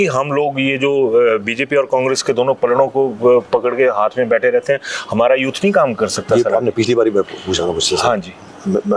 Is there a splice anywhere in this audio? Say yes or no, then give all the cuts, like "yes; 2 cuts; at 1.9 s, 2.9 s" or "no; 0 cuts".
no; 0 cuts